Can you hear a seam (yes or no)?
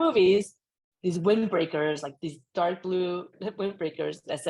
yes